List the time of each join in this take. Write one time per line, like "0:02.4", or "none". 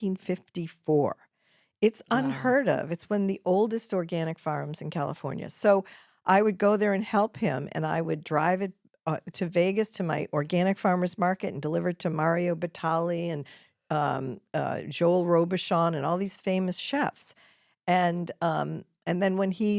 none